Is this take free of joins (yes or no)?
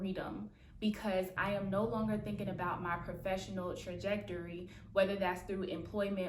no